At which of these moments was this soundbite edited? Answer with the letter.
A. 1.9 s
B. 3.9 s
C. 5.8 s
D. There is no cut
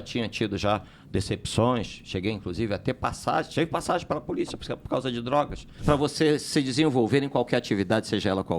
C